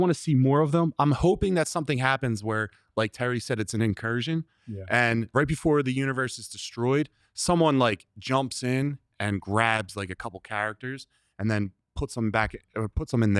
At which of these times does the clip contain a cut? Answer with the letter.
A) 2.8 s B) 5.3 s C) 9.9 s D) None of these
B